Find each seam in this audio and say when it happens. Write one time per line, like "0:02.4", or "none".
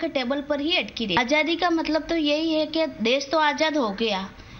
0:01.2